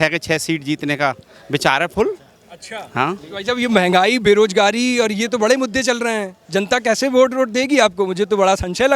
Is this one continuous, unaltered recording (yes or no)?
yes